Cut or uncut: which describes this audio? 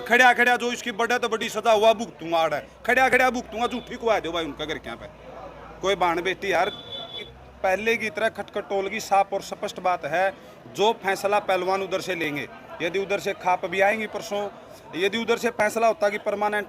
cut